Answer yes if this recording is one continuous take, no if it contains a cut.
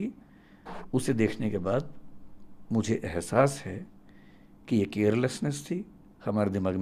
yes